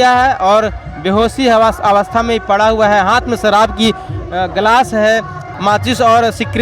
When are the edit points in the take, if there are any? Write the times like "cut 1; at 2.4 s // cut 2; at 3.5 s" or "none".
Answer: cut 1; at 5.5 s